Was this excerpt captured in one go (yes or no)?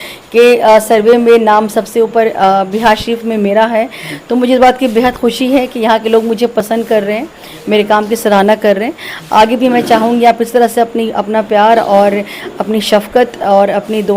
yes